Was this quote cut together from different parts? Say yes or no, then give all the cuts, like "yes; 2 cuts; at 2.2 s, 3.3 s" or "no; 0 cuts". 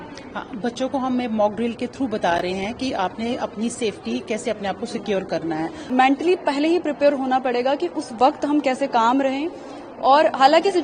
yes; 1 cut; at 5.8 s